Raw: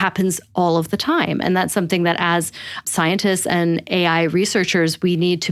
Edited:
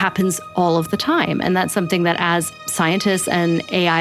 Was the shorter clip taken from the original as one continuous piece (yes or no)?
no